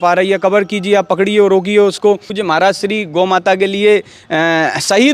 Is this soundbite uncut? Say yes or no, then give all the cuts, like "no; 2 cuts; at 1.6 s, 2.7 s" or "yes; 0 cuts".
no; 1 cut; at 2.3 s